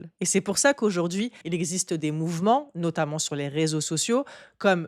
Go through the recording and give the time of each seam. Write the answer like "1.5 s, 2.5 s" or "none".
1.4 s